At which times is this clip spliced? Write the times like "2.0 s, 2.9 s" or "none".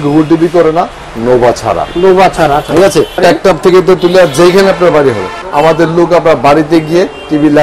3.2 s, 5.4 s